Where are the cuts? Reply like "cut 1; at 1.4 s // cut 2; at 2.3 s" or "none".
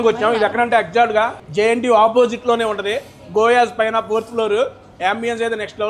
cut 1; at 1.4 s